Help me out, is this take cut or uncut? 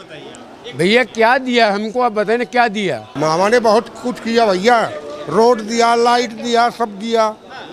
cut